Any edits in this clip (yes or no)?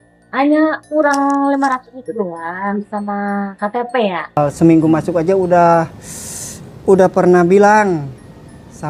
yes